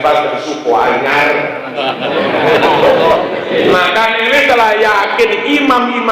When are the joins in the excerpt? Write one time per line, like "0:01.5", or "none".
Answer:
0:03.5